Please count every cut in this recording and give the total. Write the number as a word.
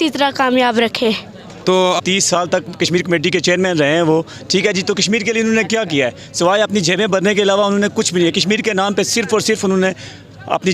one